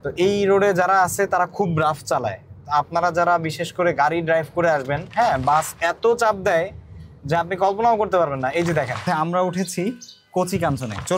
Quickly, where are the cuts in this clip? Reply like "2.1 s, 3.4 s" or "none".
5.0 s, 9.0 s